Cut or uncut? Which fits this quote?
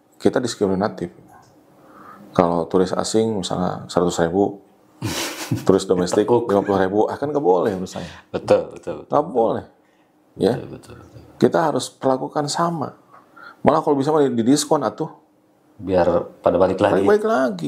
uncut